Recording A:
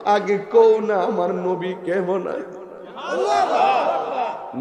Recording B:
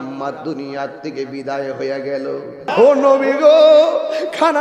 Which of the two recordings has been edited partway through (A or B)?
B